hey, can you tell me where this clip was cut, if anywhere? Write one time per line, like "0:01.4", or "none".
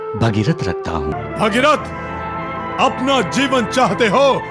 0:01.1